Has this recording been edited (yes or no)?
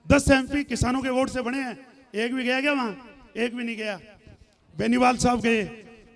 no